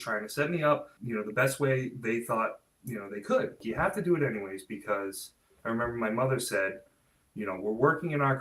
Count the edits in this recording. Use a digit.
3